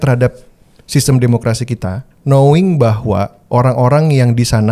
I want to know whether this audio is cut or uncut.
cut